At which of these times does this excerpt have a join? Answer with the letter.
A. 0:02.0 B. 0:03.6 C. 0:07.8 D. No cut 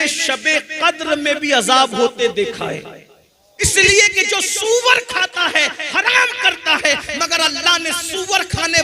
B